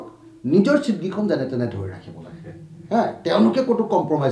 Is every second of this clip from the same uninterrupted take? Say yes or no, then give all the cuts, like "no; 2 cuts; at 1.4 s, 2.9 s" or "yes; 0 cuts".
no; 1 cut; at 1.7 s